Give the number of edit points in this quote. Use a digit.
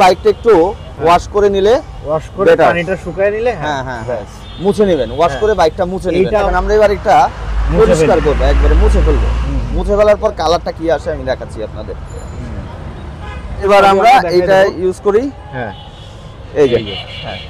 2